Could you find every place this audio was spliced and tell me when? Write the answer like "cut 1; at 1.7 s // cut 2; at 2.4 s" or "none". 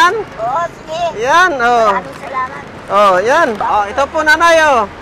cut 1; at 3.6 s